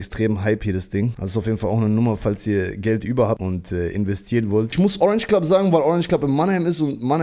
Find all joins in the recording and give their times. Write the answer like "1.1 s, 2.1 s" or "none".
1.2 s, 3.4 s, 4.7 s

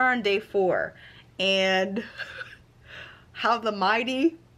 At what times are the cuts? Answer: none

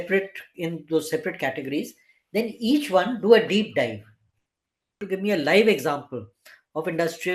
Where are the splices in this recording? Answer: 5.0 s

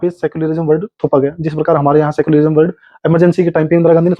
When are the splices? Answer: none

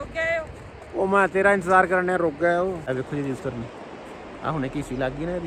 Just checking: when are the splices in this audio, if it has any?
2.8 s

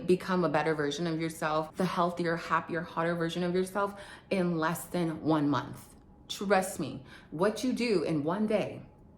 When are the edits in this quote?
1.7 s

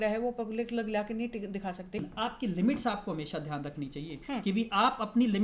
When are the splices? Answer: 2.1 s

